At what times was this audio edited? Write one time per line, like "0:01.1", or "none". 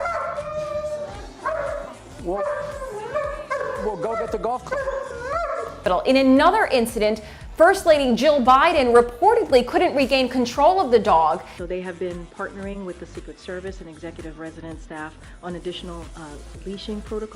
none